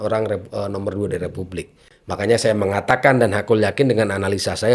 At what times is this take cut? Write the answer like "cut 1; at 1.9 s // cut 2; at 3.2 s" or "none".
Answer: none